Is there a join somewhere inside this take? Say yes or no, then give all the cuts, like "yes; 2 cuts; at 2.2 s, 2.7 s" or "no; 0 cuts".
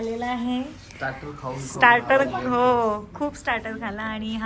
no; 0 cuts